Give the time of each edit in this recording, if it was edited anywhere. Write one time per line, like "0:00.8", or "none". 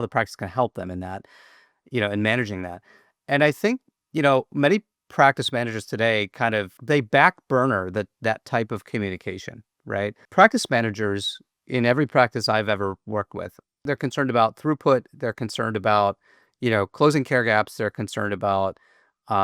0:06.8
0:10.2
0:13.7